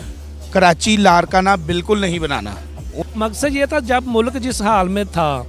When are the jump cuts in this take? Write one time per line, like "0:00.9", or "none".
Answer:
0:02.8